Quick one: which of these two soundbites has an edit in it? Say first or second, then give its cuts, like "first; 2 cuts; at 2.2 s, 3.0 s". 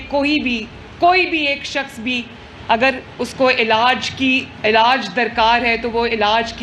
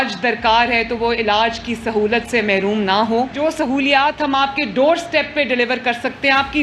second; 1 cut; at 3.3 s